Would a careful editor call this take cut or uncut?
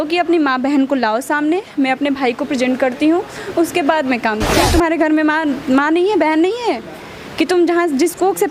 cut